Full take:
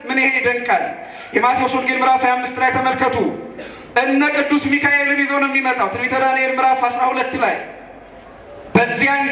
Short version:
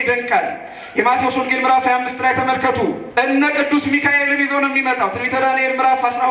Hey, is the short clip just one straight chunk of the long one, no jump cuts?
no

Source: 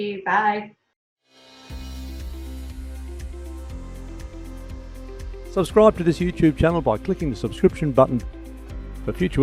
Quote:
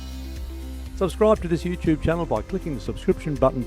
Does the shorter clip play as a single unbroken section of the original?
no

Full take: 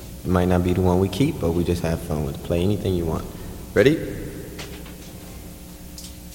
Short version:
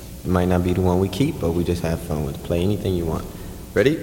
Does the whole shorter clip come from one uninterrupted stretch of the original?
yes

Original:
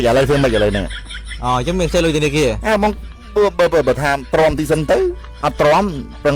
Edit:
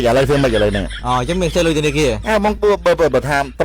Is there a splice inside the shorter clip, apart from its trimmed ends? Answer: yes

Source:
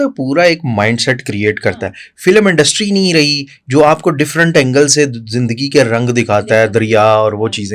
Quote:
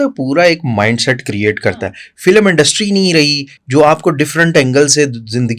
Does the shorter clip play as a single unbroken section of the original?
yes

